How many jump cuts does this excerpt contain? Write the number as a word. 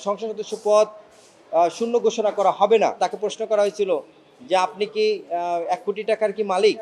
one